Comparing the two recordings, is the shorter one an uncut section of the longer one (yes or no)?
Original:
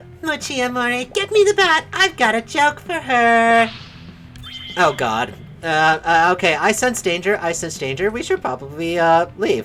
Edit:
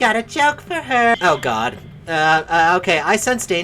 no